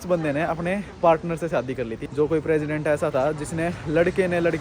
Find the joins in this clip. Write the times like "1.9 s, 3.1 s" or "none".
2.0 s